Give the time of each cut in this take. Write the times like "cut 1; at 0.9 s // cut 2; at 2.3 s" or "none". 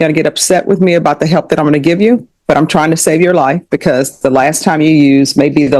none